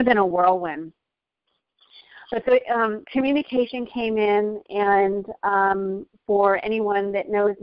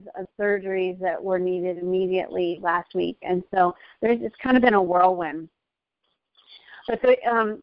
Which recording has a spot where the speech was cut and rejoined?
second; 1 cut; at 2.9 s

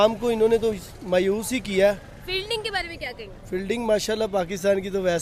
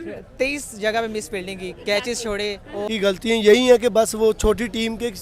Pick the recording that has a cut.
second; 1 cut; at 2.9 s

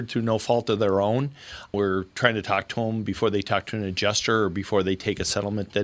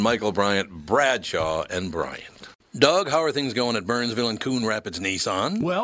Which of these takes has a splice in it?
second; 1 cut; at 2.5 s

